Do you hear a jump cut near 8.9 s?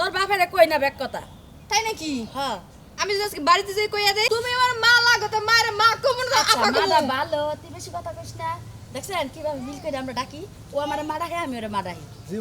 no; 1 cut; at 4.3 s

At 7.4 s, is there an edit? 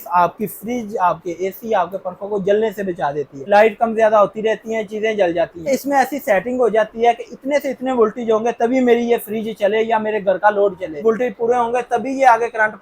no; 3 cuts; at 3.4 s, 5.7 s, 11.0 s

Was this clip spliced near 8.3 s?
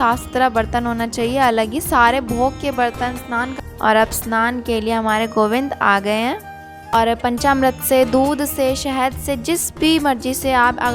no; 2 cuts; at 3.5 s, 6.9 s

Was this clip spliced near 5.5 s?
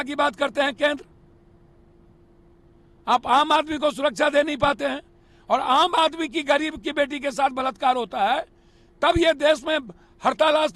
no; 0 cuts

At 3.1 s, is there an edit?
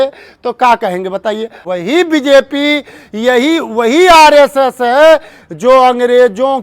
no; 1 cut; at 1.6 s

